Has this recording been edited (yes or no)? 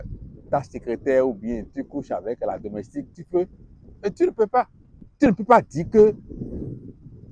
no